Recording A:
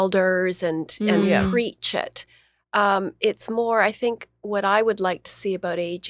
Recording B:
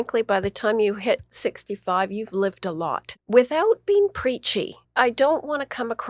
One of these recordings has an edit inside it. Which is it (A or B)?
B